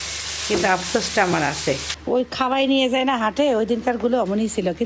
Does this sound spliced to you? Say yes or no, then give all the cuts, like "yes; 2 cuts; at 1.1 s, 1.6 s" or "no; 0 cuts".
yes; 1 cut; at 1.9 s